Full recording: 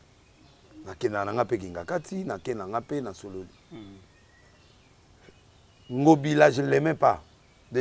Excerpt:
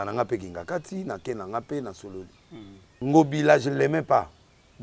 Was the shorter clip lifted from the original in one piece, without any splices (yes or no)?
no